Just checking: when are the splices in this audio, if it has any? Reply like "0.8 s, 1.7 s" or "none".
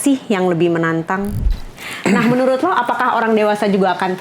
1.6 s